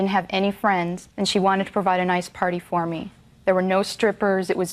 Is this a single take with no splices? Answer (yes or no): no